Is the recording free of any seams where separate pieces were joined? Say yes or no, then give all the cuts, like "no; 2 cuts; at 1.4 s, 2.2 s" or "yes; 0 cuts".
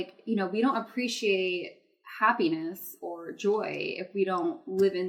yes; 0 cuts